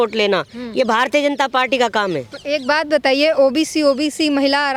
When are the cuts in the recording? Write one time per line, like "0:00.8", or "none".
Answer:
none